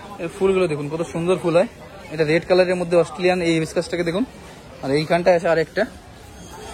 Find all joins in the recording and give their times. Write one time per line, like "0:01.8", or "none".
none